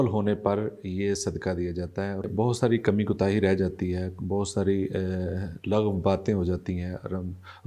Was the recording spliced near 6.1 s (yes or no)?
no